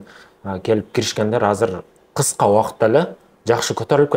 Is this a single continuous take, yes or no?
yes